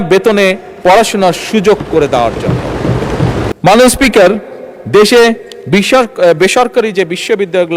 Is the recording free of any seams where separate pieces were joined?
no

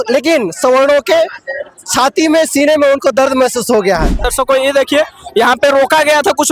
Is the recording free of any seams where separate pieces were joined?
no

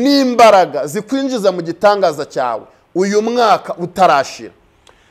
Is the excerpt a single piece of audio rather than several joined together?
yes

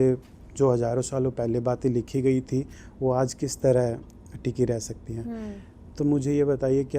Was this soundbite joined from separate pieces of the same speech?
no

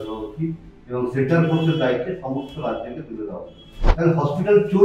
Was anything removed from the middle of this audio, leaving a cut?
yes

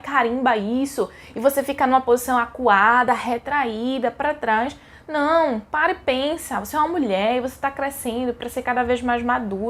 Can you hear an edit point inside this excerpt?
no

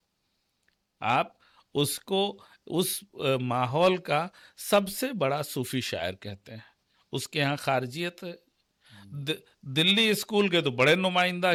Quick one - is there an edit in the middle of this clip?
no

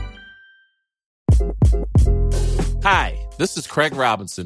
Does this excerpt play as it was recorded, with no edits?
yes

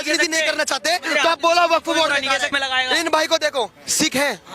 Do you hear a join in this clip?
yes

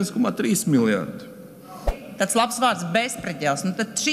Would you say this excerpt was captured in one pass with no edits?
no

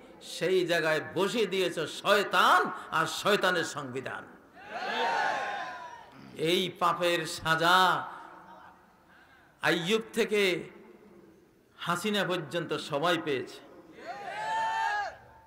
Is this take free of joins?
yes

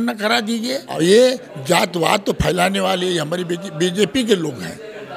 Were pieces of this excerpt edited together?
yes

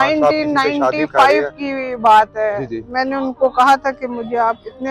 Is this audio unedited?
yes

